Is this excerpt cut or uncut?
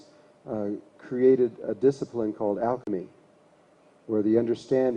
uncut